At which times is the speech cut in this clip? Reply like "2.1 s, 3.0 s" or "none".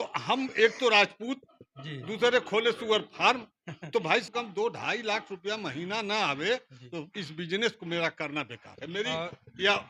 4.3 s